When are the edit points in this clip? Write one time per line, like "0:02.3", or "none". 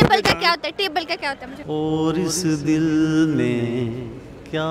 0:01.5